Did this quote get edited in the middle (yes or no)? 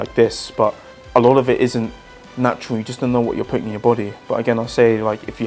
yes